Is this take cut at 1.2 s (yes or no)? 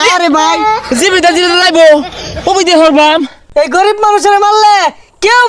no